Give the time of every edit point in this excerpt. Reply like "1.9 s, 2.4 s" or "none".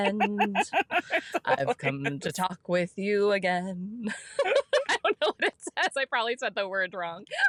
none